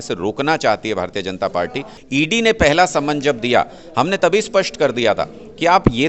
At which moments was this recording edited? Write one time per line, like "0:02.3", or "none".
0:01.9

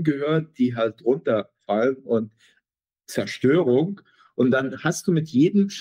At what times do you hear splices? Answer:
none

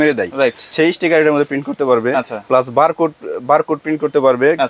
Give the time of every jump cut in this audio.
none

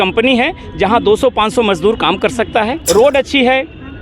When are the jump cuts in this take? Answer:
0:02.8

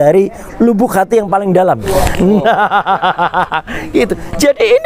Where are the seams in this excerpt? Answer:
0:01.8

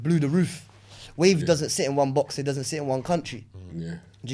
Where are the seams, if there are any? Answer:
none

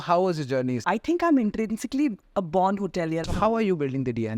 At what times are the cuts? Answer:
0:00.8
0:03.2

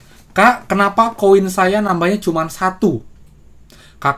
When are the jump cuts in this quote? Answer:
none

